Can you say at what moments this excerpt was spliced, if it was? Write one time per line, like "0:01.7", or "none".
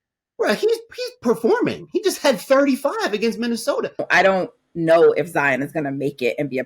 0:04.0